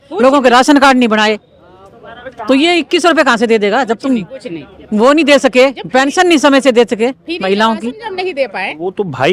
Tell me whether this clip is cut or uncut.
uncut